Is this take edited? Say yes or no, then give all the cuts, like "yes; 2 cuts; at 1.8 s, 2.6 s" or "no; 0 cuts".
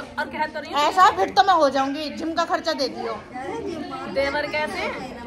no; 0 cuts